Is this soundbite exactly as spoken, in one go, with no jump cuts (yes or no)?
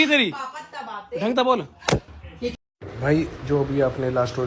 yes